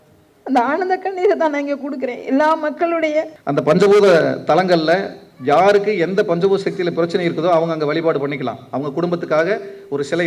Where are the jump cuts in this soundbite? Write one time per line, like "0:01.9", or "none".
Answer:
0:03.4